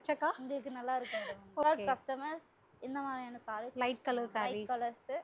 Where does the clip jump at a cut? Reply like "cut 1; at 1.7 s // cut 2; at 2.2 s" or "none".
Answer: cut 1; at 1.6 s